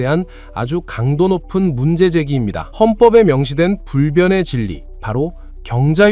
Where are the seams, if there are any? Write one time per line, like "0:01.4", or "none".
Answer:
0:02.6